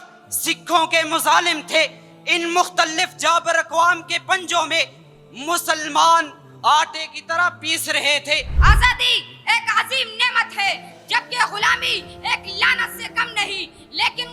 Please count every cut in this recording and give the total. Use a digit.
1